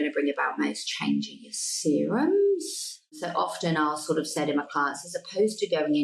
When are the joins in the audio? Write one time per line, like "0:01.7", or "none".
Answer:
0:03.2

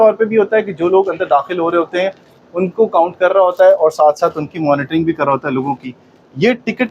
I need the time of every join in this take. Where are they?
none

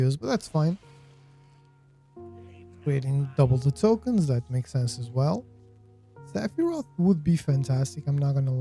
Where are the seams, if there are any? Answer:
0:01.0
0:02.8

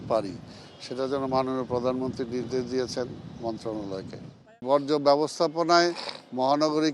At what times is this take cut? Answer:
0:04.6

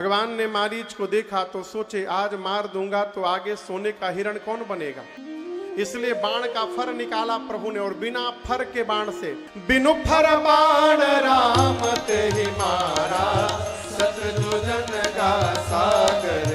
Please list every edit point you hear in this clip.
0:05.1
0:09.5

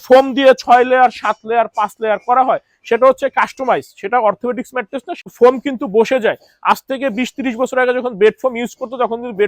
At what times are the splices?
0:05.1

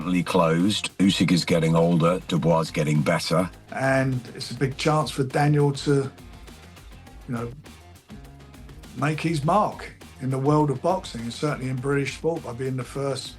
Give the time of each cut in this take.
0:03.6

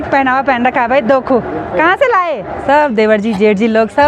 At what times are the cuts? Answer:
0:02.6

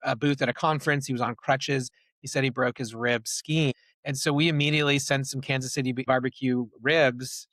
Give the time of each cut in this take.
0:03.7
0:06.1

